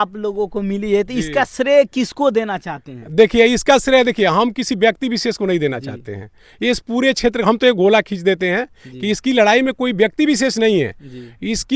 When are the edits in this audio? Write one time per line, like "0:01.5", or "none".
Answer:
none